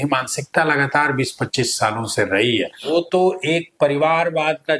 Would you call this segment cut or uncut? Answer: cut